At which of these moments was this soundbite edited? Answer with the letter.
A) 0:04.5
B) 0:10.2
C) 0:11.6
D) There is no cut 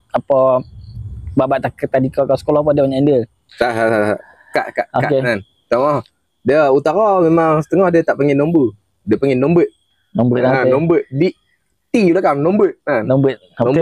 D